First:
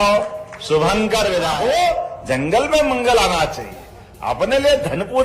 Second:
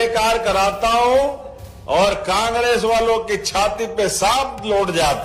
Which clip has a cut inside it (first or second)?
first